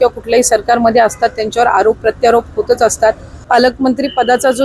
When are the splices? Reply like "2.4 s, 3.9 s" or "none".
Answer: 3.3 s